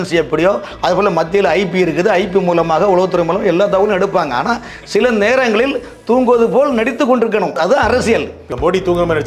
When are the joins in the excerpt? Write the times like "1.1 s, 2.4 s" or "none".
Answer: 7.5 s, 8.5 s